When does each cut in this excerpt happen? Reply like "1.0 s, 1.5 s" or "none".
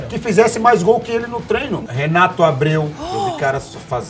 1.8 s